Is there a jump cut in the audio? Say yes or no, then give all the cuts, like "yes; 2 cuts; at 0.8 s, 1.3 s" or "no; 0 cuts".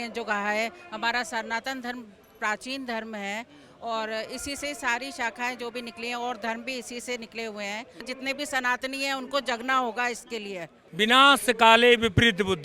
yes; 2 cuts; at 8.1 s, 10.8 s